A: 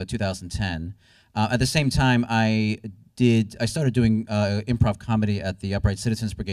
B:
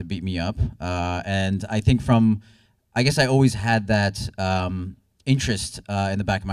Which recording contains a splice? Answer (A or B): B